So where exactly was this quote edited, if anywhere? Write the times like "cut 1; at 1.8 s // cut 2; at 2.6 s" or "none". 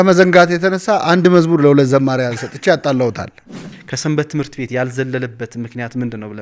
cut 1; at 3.7 s

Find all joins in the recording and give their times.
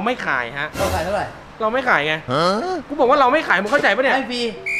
cut 1; at 1.4 s // cut 2; at 2.9 s

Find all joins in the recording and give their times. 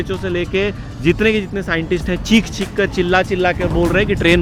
none

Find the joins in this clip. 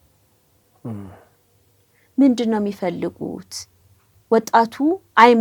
none

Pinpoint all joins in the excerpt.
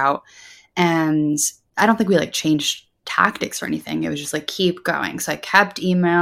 cut 1; at 1.6 s

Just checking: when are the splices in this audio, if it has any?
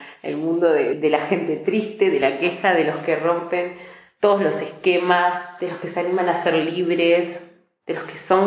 cut 1; at 1.0 s

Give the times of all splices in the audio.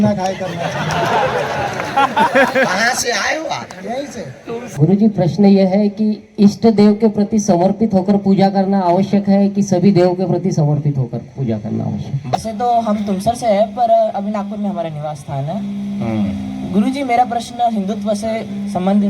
cut 1; at 4.7 s // cut 2; at 12.4 s

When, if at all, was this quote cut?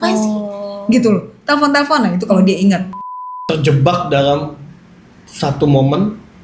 cut 1; at 3.4 s

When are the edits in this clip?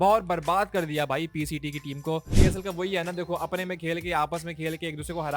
cut 1; at 2.3 s

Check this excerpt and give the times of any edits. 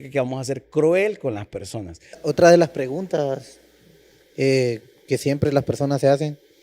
cut 1; at 2.2 s

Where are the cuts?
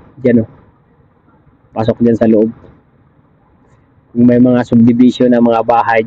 none

